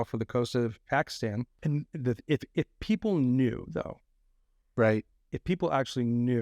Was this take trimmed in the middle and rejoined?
yes; 1 cut; at 1.5 s

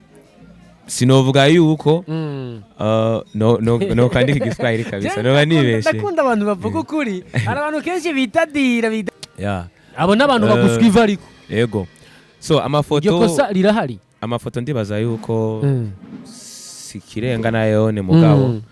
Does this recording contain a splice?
yes; 1 cut; at 9.0 s

